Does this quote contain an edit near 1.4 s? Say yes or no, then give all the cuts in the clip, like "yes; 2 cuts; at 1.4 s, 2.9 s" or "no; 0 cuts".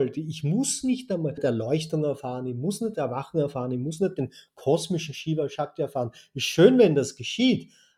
yes; 1 cut; at 1.4 s